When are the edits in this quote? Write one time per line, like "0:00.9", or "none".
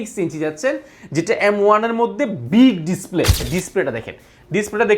0:03.5